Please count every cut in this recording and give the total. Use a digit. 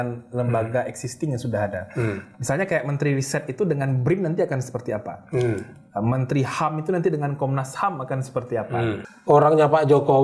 1